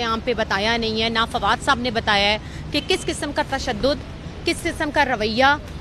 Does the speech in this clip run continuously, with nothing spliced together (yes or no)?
yes